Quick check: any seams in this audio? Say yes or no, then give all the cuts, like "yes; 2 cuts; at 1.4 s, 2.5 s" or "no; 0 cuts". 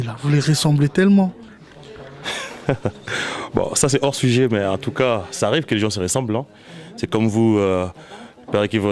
no; 0 cuts